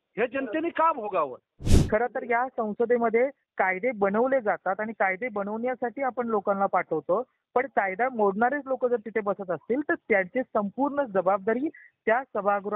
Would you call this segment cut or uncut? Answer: cut